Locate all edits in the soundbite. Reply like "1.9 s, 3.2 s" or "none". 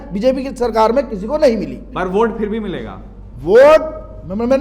1.9 s